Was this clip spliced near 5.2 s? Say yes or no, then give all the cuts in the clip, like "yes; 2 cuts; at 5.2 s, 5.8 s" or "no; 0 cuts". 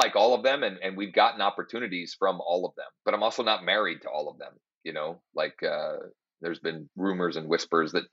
no; 2 cuts; at 2.9 s, 6.9 s